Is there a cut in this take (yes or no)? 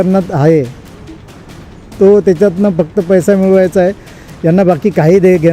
no